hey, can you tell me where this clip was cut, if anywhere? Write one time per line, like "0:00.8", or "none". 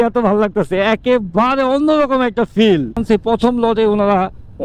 0:03.0